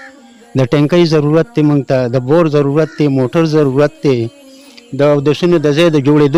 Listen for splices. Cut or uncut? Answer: uncut